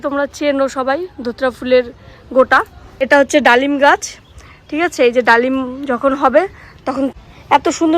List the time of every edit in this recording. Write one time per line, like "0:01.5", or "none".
0:02.9
0:07.1